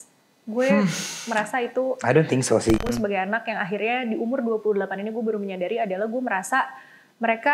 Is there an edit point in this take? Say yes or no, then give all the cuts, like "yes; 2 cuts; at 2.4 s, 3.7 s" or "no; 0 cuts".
yes; 1 cut; at 2.8 s